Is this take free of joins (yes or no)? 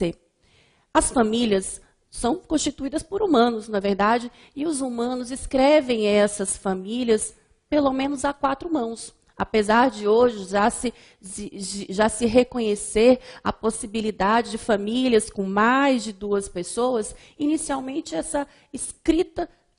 no